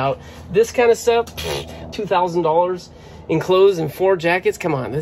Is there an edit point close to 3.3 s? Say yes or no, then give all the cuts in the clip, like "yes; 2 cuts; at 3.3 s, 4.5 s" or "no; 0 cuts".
no; 1 cut; at 1.9 s